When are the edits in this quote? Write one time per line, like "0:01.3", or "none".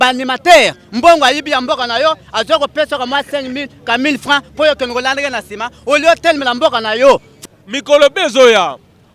0:07.3

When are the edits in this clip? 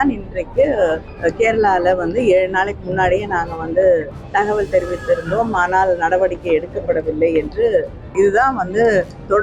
0:01.1
0:04.2
0:08.1

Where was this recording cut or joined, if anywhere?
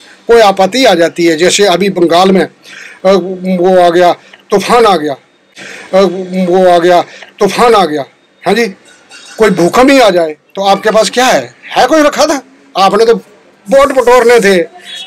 none

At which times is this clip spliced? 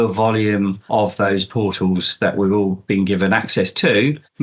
0:01.1

